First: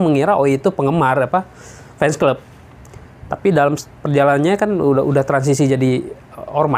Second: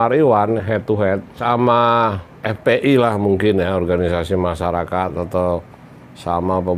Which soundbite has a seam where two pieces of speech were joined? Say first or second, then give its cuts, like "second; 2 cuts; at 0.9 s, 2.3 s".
second; 1 cut; at 1.3 s